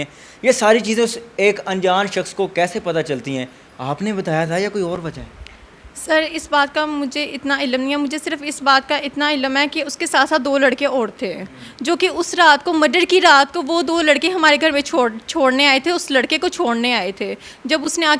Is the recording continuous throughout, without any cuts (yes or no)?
yes